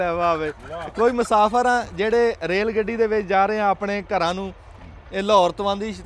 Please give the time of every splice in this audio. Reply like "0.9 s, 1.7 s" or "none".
none